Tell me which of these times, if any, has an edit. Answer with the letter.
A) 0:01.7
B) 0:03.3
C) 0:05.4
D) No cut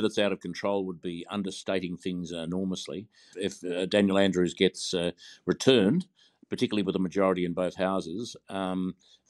B